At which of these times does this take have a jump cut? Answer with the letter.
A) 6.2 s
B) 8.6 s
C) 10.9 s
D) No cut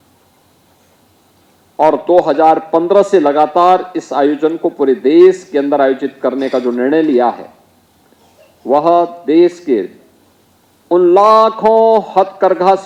D